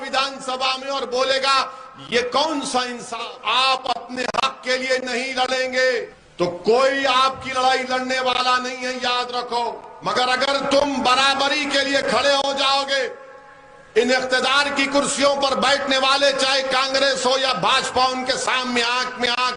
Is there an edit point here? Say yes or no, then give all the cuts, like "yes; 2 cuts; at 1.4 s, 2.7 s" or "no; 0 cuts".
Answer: yes; 3 cuts; at 3.2 s, 6.2 s, 9.9 s